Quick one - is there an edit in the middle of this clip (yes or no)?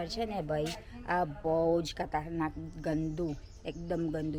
no